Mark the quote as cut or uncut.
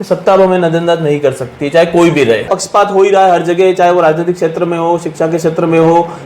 cut